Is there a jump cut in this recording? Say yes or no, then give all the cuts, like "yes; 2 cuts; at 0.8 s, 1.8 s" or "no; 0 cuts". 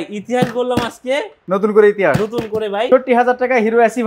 yes; 2 cuts; at 1.4 s, 2.9 s